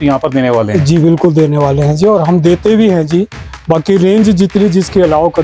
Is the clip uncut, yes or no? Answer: yes